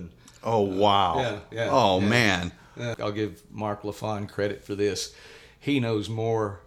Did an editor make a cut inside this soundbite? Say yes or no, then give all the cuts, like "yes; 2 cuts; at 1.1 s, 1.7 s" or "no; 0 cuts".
yes; 1 cut; at 2.9 s